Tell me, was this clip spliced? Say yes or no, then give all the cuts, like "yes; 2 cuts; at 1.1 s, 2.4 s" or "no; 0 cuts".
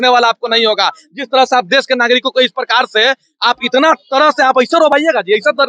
no; 0 cuts